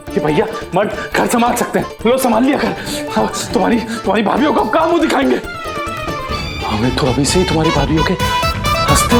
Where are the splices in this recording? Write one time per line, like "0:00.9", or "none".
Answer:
none